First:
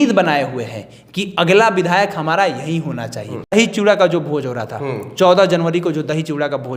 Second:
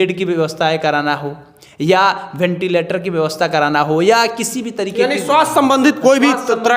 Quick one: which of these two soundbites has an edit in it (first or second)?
first